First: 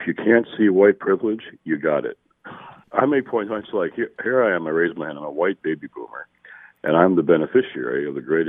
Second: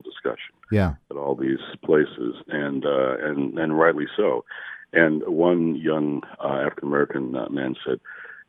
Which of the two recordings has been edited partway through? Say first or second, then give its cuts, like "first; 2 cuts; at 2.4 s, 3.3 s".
first; 1 cut; at 2.6 s